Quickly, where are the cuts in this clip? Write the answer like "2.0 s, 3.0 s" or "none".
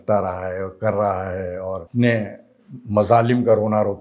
1.9 s